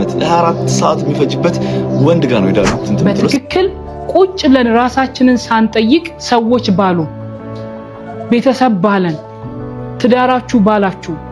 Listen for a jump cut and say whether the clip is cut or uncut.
cut